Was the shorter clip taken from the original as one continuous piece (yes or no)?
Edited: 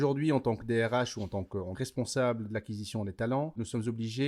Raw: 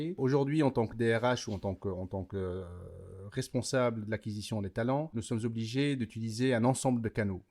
no